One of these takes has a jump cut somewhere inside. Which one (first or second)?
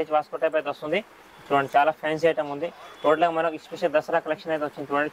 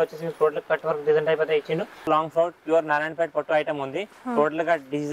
second